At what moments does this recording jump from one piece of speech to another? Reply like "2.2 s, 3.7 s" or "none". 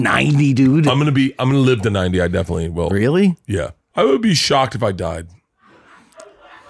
2.9 s, 3.8 s

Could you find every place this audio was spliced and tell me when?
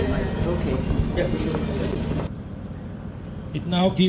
2.3 s

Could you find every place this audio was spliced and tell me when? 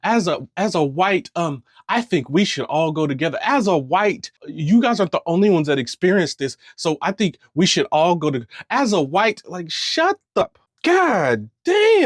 10.4 s

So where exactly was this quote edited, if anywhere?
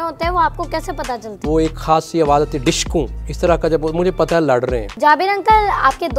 1.4 s, 3.2 s, 4.9 s

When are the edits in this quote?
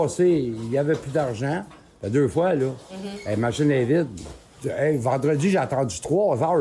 4.6 s

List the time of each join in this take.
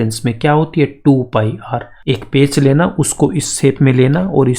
1.9 s

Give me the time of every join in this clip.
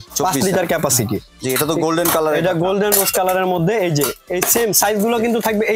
1.3 s

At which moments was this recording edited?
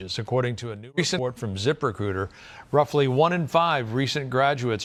none

